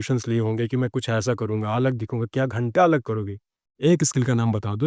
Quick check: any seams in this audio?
yes; 1 cut; at 3.6 s

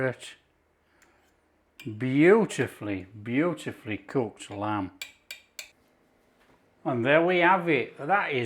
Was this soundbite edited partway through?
yes; 1 cut; at 5.8 s

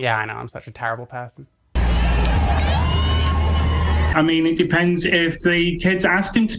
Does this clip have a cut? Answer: yes; 2 cuts; at 1.8 s, 4.1 s

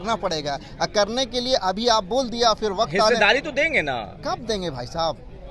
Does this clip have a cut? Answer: no; 0 cuts

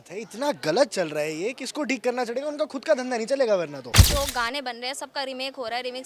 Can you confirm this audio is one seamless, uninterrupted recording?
no; 1 cut; at 4.0 s

